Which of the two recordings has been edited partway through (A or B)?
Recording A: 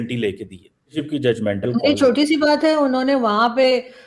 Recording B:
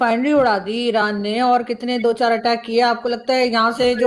A